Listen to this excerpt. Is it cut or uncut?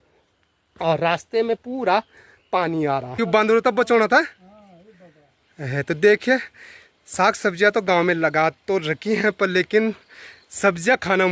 cut